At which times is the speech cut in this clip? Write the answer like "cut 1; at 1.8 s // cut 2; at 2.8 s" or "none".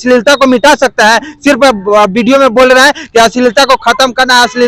none